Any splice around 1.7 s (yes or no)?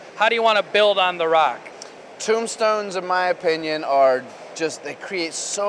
yes